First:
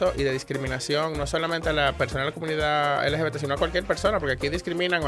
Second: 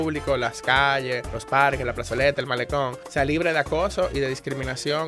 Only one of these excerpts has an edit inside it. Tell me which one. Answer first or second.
second